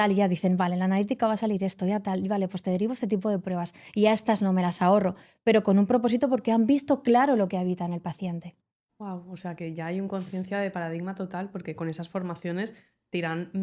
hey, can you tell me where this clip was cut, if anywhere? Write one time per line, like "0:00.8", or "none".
none